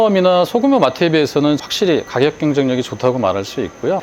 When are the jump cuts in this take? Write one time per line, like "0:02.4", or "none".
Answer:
none